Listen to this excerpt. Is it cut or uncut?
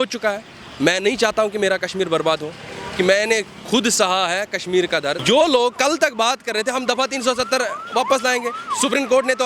cut